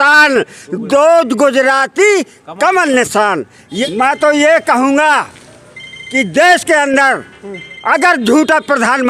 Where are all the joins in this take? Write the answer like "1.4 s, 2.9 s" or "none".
3.8 s